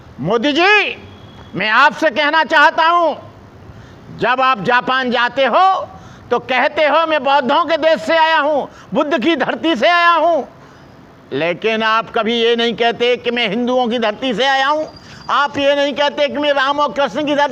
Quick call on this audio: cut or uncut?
uncut